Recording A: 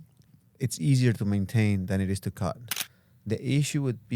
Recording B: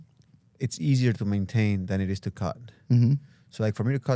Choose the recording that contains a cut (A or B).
A